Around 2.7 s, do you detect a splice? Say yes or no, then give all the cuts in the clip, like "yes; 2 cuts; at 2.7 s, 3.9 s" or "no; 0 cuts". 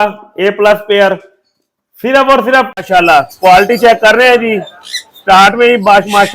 yes; 1 cut; at 2.7 s